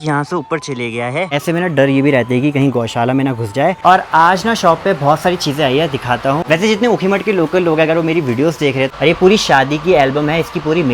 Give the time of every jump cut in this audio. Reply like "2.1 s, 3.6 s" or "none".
1.3 s, 3.8 s, 6.4 s, 8.9 s